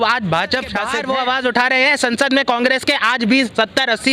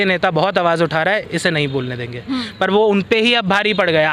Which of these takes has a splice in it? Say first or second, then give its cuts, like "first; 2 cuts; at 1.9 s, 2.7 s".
first; 1 cut; at 0.9 s